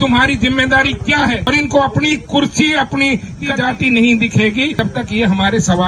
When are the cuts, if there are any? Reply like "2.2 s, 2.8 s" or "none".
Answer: 1.4 s, 3.5 s, 4.8 s